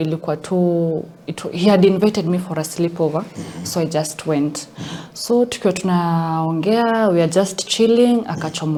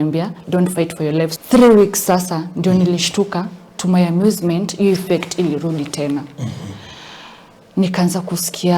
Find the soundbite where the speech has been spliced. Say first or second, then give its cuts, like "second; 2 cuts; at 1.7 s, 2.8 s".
second; 1 cut; at 1.4 s